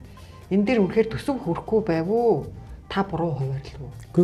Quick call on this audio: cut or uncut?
uncut